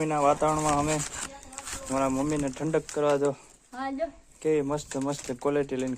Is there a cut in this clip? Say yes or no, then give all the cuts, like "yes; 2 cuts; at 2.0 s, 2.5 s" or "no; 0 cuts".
no; 0 cuts